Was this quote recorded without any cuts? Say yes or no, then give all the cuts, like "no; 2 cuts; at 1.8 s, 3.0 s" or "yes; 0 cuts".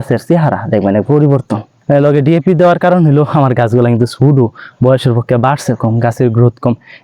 no; 1 cut; at 1.7 s